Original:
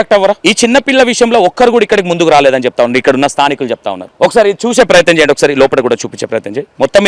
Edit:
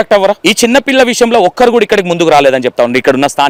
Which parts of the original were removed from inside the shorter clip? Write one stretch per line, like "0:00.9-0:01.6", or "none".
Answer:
none